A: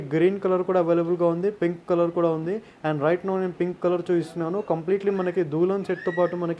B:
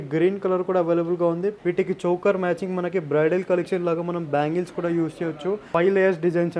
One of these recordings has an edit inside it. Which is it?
B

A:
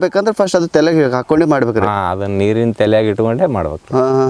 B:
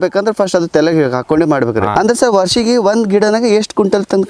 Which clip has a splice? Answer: B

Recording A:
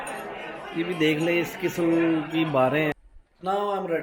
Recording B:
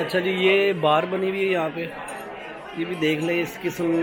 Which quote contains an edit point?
A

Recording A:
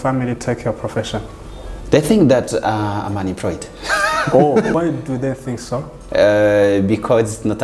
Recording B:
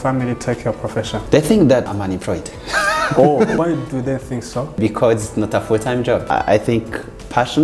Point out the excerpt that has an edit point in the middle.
B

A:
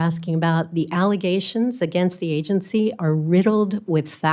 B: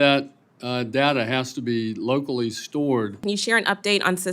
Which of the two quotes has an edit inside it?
B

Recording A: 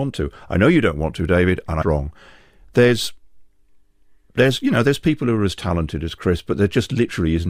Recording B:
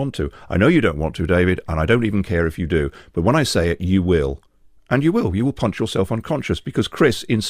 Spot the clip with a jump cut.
B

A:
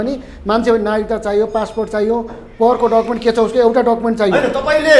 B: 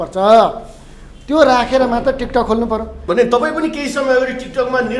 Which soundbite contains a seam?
B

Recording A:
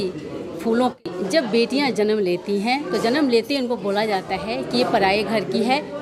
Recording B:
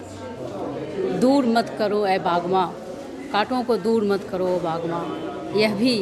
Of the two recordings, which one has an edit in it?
A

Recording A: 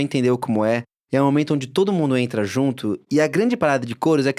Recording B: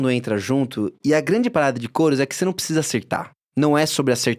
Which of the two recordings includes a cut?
A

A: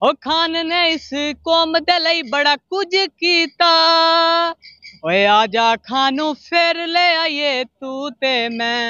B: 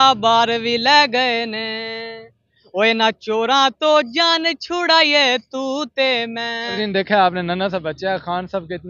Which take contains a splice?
B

